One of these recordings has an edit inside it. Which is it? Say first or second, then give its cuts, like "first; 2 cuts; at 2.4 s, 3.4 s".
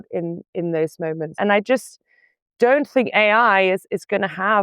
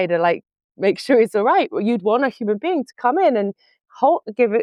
first; 1 cut; at 1.3 s